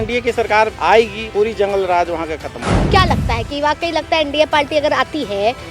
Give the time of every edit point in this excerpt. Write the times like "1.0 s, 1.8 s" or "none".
2.9 s

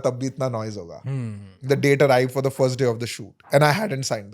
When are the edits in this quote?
1.6 s

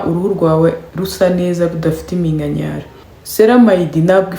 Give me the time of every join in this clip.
3.1 s

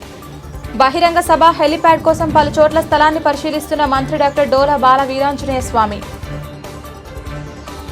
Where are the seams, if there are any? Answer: 6.0 s

